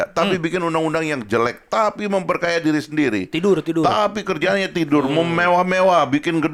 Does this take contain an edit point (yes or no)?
no